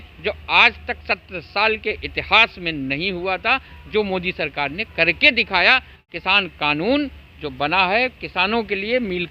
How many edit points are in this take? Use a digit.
1